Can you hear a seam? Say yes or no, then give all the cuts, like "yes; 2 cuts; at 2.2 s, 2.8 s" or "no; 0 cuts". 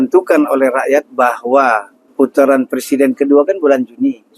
yes; 1 cut; at 2.0 s